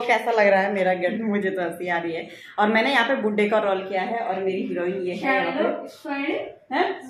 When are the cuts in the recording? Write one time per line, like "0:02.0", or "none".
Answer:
0:01.1